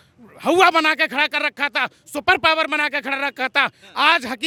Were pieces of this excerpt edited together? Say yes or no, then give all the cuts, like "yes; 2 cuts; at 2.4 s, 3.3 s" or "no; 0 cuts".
no; 0 cuts